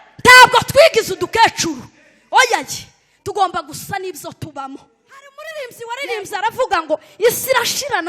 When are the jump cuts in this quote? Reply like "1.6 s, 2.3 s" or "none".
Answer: 5.4 s